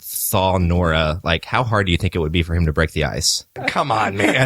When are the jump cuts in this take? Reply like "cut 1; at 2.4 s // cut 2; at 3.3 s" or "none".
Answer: cut 1; at 3.5 s